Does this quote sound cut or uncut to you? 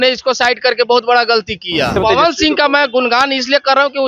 cut